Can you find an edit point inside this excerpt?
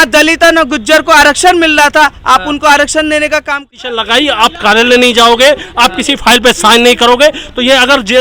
yes; 1 cut; at 3.8 s

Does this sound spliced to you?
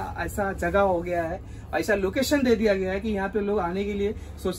no; 0 cuts

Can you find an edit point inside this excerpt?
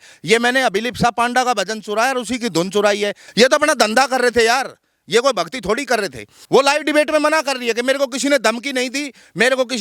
yes; 2 cuts; at 3.2 s, 6.3 s

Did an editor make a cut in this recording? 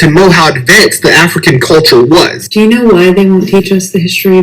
yes; 1 cut; at 2.4 s

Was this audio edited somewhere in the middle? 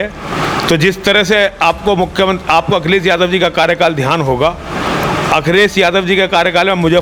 no; 0 cuts

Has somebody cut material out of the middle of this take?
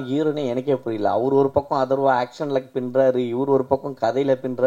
no; 0 cuts

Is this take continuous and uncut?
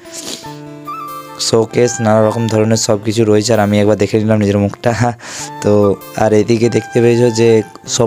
yes; 0 cuts

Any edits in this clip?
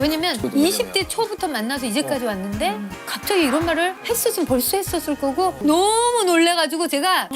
no; 0 cuts

